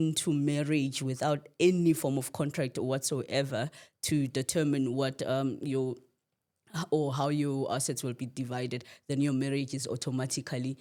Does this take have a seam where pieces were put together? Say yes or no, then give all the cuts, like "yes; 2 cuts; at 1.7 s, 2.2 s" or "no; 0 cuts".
no; 0 cuts